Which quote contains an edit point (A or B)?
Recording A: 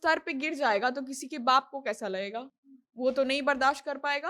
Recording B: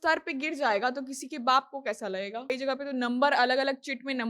B